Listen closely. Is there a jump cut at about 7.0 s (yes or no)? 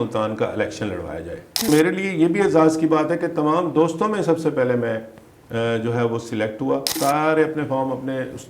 yes